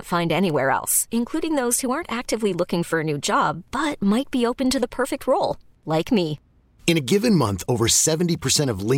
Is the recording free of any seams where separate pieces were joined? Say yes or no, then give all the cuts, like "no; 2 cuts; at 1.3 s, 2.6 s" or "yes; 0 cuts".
yes; 0 cuts